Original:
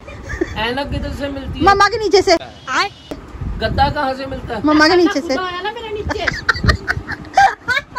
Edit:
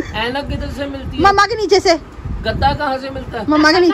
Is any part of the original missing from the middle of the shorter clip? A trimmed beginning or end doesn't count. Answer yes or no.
yes